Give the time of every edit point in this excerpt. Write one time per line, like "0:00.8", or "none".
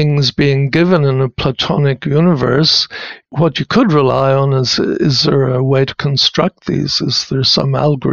none